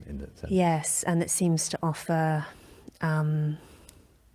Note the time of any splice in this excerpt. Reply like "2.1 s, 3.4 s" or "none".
none